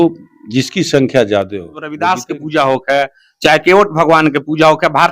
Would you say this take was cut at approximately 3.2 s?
no; 1 cut; at 1.9 s

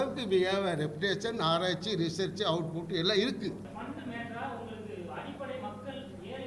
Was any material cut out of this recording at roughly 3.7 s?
yes; 1 cut; at 3.7 s

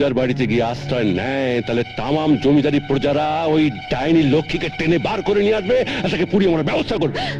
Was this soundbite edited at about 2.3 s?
no; 0 cuts

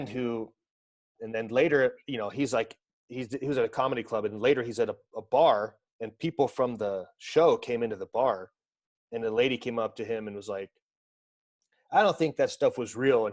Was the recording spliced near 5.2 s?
no; 1 cut; at 1.2 s

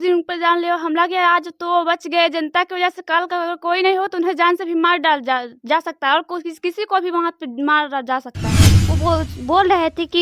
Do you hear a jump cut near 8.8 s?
yes; 1 cut; at 8.8 s

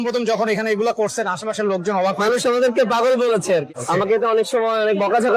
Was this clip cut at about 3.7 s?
yes; 1 cut; at 3.7 s

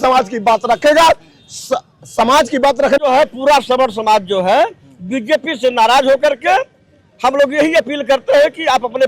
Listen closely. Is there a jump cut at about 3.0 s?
yes; 1 cut; at 3.0 s

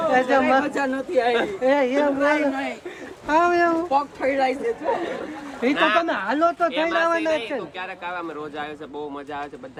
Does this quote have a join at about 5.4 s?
no; 0 cuts

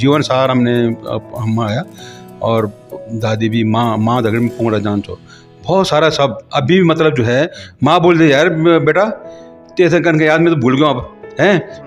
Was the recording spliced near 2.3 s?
no; 0 cuts

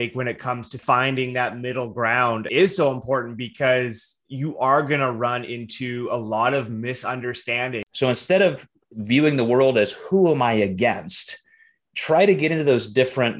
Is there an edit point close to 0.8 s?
yes; 3 cuts; at 0.8 s, 2.5 s, 7.8 s

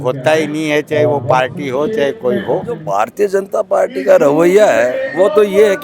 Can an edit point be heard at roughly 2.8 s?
yes; 1 cut; at 2.8 s

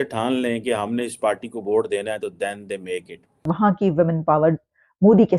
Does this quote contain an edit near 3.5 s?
yes; 1 cut; at 3.5 s

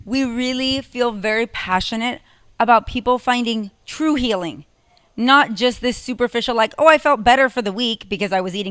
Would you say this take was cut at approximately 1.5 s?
no; 0 cuts

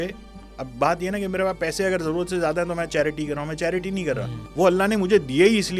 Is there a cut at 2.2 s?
no; 1 cut; at 4.4 s

